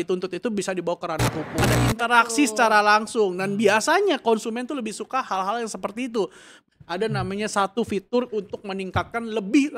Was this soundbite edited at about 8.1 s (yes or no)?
no